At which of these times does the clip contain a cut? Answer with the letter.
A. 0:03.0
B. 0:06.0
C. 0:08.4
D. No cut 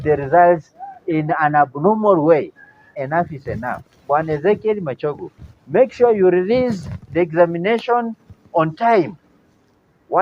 A